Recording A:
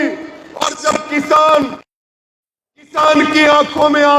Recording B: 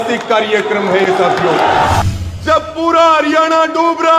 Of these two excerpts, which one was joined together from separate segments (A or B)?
B